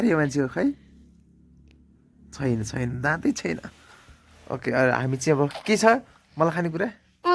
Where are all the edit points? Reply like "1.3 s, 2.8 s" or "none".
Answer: none